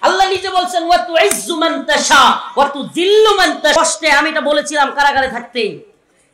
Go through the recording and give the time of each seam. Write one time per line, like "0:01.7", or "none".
0:03.8